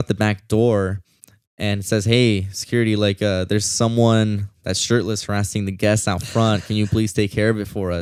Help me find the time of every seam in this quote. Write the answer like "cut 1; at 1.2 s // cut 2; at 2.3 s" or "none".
none